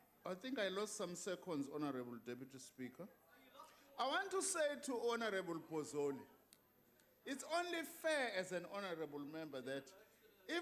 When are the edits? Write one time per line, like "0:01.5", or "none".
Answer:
0:02.5

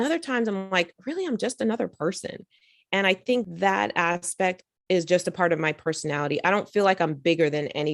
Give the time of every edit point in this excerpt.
0:03.5

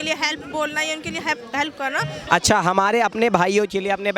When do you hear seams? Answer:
0:02.2

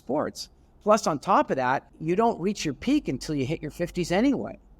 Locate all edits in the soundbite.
0:01.9

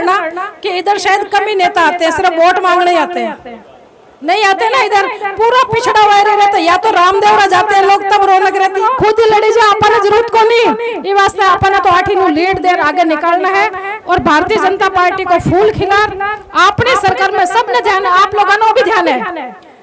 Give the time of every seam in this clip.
0:08.8

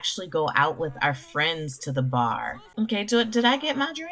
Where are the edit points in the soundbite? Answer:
0:02.6

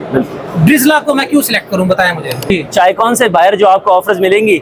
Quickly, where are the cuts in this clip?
0:02.5

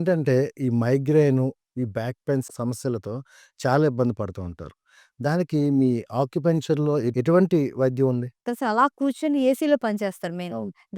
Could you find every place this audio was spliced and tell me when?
0:08.5

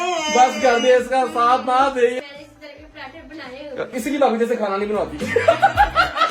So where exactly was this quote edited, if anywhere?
0:02.2
0:03.9

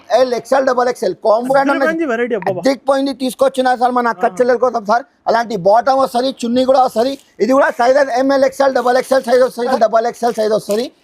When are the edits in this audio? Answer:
0:01.5
0:09.7

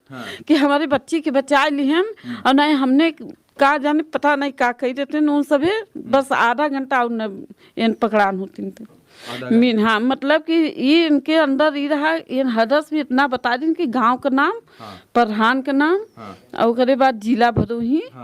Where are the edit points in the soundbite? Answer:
none

